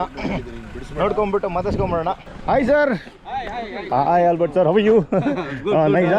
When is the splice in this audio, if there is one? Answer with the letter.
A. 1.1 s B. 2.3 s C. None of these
B